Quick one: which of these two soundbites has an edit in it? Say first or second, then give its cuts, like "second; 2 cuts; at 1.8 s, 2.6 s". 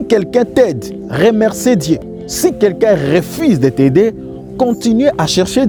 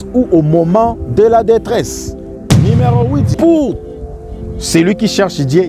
second; 2 cuts; at 2.3 s, 3.3 s